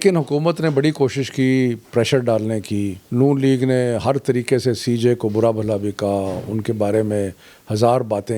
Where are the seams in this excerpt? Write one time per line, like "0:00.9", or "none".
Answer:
0:03.0

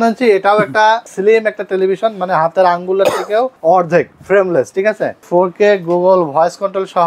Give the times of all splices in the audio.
0:01.1
0:03.5
0:05.2

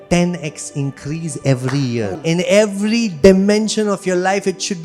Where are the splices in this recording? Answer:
0:02.2

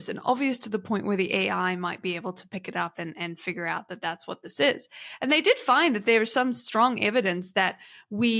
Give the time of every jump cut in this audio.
none

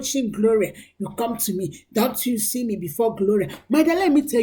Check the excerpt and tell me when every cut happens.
none

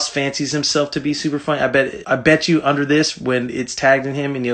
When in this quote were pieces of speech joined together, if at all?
0:02.0

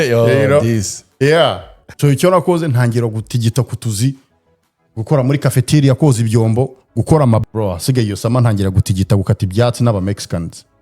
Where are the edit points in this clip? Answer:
0:01.8
0:07.4

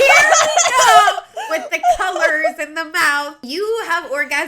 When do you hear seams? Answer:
0:03.4

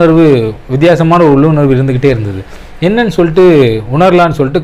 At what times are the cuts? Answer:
none

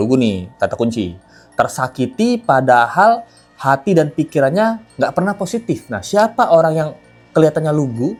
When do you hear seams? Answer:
none

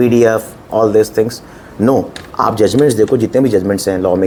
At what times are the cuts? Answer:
none

